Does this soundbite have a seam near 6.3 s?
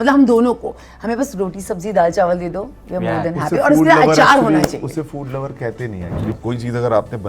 yes; 1 cut; at 6.3 s

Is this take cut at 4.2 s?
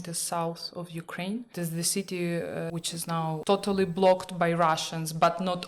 no; 2 cuts; at 1.5 s, 2.7 s

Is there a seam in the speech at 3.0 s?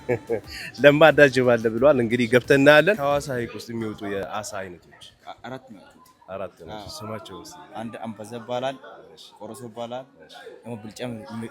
yes; 1 cut; at 3.0 s

